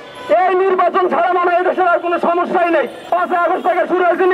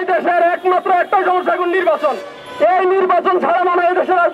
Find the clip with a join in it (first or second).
first